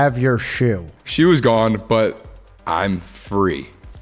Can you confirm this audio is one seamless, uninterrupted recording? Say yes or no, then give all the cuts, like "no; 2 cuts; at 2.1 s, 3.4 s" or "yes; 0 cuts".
no; 1 cut; at 1.0 s